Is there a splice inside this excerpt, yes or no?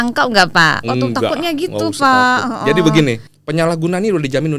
yes